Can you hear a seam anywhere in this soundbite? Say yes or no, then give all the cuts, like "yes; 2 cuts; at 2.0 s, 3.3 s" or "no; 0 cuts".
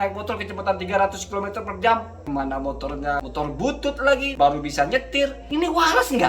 yes; 4 cuts; at 2.1 s, 3.2 s, 4.3 s, 5.4 s